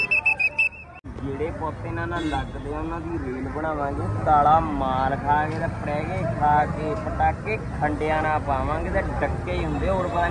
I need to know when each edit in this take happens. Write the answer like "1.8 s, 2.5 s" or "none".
1.1 s

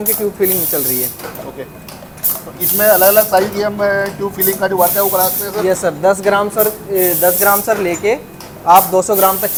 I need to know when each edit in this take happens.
none

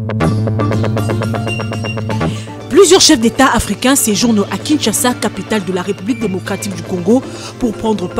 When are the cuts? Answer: 2.5 s

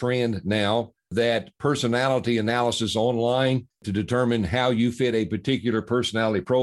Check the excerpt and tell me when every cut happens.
1.0 s

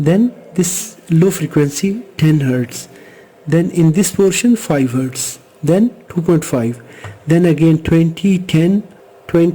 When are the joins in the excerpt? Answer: none

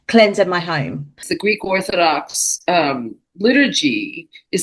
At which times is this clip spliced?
1.3 s

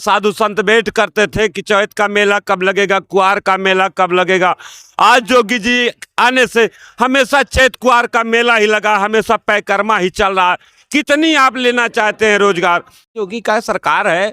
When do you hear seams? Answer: 13.1 s

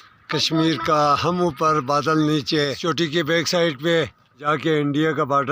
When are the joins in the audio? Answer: 2.8 s, 4.4 s

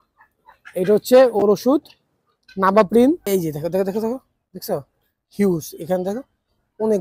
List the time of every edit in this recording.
3.2 s

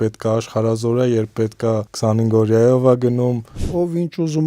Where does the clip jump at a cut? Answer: 1.9 s, 3.6 s

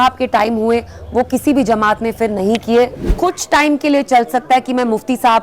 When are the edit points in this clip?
3.1 s

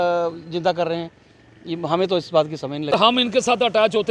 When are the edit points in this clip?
3.1 s

